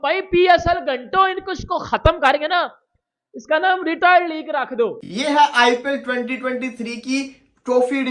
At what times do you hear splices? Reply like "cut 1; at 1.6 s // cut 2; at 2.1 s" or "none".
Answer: cut 1; at 5.1 s